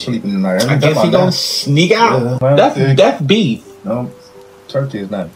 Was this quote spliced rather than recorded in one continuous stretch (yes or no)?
yes